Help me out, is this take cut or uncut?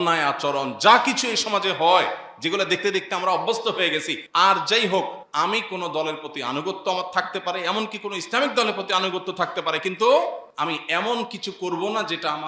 cut